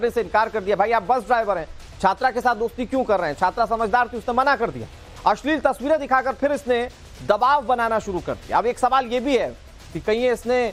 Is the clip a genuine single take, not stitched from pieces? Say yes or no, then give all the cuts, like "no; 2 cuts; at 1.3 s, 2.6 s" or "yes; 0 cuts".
yes; 0 cuts